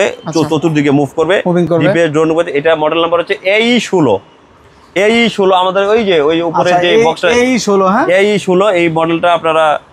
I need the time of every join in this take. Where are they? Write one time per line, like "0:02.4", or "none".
none

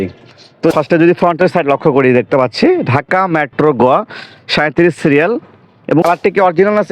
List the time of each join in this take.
0:00.7
0:06.0

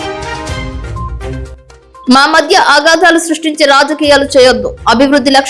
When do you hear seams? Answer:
0:01.0
0:02.0

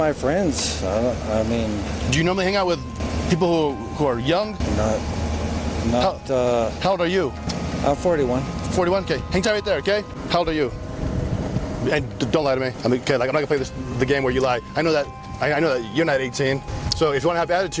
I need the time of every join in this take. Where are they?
none

